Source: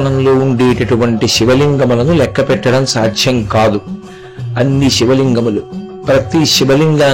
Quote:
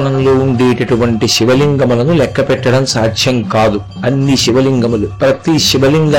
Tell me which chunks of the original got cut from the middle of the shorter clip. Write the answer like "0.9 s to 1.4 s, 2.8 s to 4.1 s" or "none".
3.9 s to 4.4 s, 5.6 s to 6.0 s